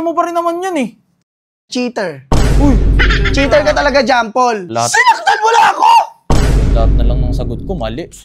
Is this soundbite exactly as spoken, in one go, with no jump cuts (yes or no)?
no